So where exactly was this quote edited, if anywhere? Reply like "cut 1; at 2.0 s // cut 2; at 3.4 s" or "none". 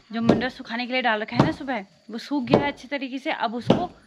none